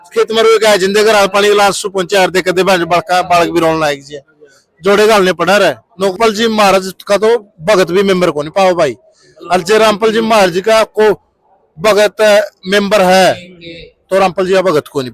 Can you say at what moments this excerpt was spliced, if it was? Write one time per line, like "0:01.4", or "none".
0:06.1